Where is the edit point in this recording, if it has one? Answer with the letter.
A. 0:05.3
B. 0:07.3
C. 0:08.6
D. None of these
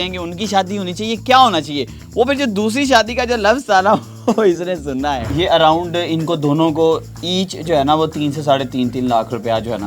A